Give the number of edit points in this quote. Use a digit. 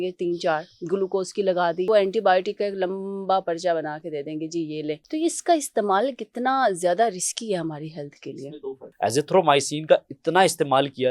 3